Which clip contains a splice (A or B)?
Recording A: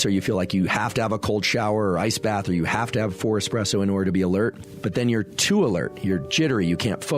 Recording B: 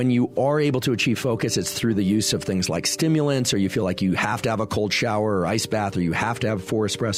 A